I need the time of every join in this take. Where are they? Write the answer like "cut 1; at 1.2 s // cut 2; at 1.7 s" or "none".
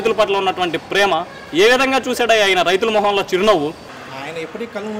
cut 1; at 3.9 s